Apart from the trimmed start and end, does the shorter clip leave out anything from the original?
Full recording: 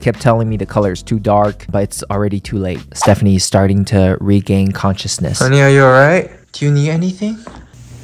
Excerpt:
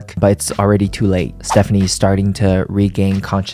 no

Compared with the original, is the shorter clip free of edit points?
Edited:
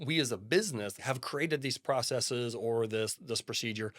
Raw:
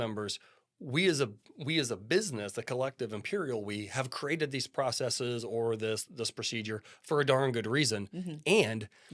no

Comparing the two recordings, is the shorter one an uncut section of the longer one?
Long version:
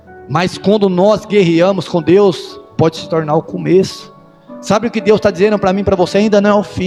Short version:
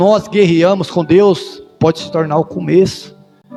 yes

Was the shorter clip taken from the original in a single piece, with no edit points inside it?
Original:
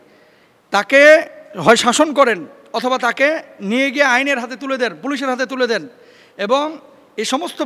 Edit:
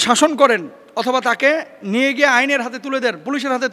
yes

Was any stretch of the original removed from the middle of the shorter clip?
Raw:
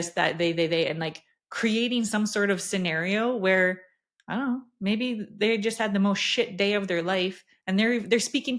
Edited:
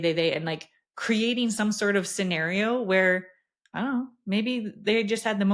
no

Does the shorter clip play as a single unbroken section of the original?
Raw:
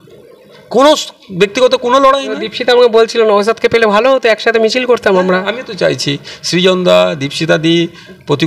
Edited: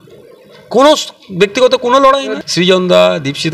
no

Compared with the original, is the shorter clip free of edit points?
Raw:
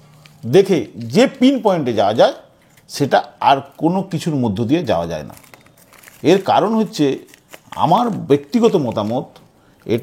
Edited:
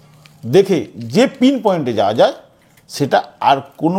yes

